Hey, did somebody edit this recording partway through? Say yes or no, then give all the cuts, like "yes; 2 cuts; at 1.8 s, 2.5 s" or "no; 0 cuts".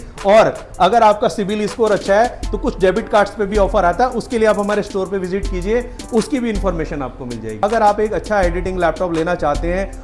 yes; 1 cut; at 7.6 s